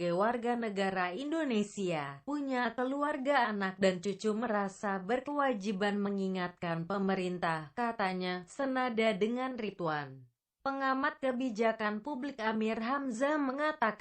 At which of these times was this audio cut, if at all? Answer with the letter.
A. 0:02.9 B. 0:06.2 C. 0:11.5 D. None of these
D